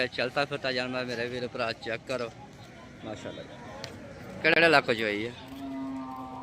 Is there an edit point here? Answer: yes; 1 cut; at 4.4 s

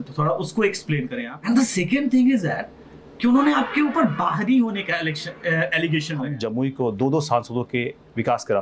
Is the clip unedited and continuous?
no; 2 cuts; at 1.3 s, 6.3 s

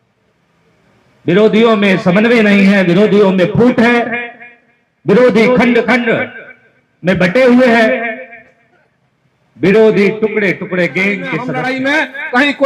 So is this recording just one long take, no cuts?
no; 1 cut; at 11.5 s

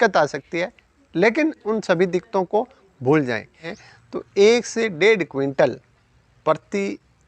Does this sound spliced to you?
yes; 1 cut; at 3.8 s

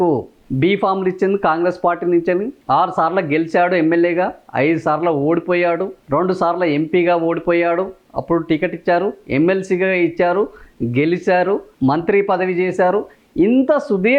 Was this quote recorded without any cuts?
yes; 0 cuts

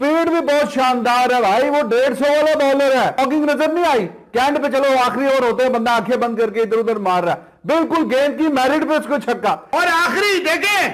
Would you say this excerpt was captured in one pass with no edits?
no; 2 cuts; at 3.2 s, 9.6 s

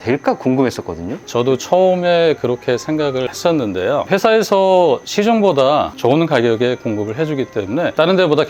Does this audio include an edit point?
no; 0 cuts

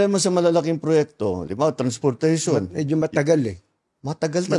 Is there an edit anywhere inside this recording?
no; 0 cuts

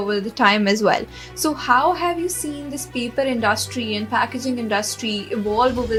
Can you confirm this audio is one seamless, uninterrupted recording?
yes; 0 cuts

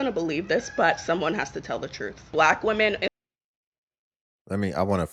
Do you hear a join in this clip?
no; 0 cuts

